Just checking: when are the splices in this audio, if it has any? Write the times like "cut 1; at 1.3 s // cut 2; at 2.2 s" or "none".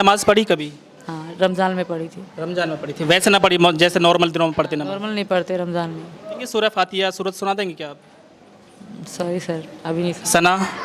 cut 1; at 6.4 s